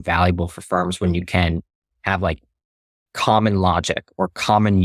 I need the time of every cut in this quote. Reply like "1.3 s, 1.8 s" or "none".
none